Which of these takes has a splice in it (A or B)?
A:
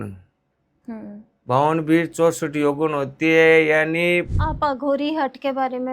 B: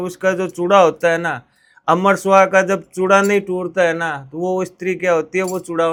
A